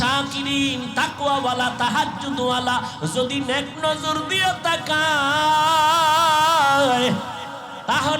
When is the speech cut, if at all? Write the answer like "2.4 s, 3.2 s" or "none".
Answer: none